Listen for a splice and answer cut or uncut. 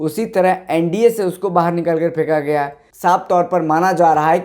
cut